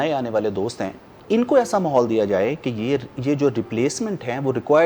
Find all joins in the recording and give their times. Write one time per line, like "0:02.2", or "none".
0:01.1